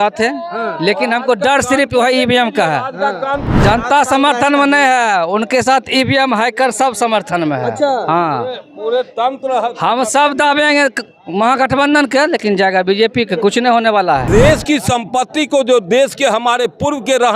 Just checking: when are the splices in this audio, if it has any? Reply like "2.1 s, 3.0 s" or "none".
3.4 s, 14.2 s